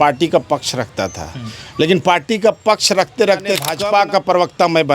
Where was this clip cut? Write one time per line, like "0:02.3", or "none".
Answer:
0:03.8